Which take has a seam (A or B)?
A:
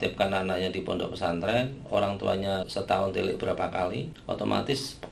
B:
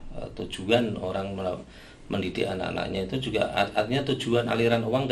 A